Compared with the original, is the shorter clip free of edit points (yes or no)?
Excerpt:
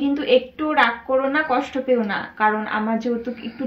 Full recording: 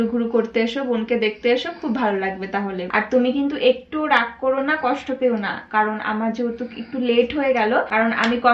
yes